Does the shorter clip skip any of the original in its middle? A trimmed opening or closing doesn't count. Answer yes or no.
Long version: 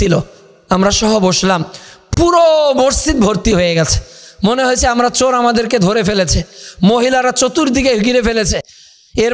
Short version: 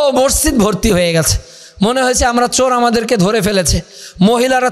no